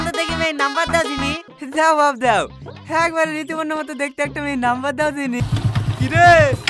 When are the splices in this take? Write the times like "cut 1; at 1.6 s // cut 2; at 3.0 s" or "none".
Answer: cut 1; at 1.5 s // cut 2; at 5.4 s